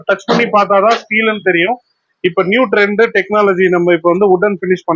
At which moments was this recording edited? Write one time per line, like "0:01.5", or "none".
none